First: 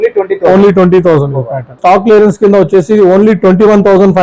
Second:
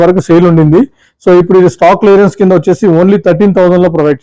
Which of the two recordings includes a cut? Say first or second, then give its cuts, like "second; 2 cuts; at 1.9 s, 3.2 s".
first; 1 cut; at 1.8 s